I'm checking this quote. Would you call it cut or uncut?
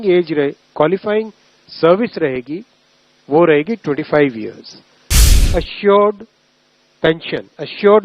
cut